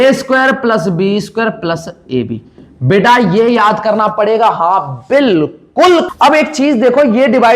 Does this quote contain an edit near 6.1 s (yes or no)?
yes